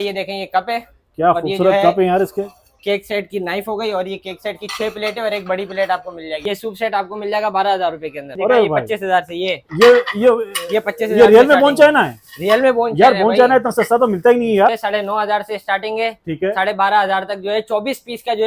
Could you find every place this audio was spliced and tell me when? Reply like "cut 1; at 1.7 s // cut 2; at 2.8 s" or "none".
cut 1; at 6.3 s // cut 2; at 8.3 s // cut 3; at 14.7 s